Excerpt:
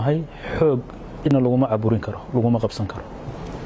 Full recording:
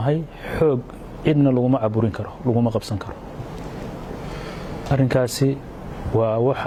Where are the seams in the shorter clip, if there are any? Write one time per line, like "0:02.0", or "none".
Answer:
0:01.2